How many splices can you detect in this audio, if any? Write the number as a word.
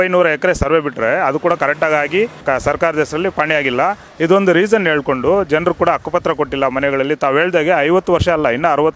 one